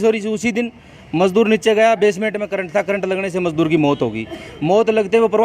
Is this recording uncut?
yes; 0 cuts

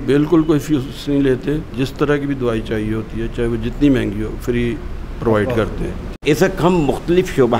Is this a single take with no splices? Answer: no; 2 cuts; at 1.8 s, 6.0 s

